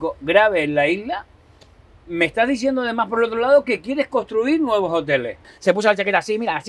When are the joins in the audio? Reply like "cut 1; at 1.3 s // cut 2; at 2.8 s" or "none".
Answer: cut 1; at 5.5 s